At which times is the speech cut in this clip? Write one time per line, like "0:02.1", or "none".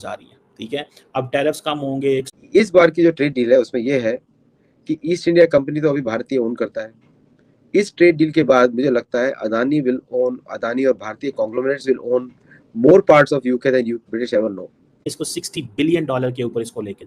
0:02.3
0:15.1